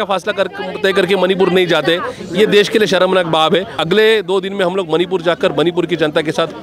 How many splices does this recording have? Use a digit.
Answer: 1